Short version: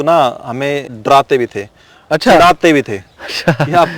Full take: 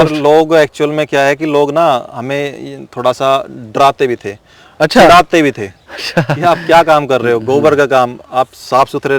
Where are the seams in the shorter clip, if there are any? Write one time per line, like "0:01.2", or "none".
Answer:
0:00.9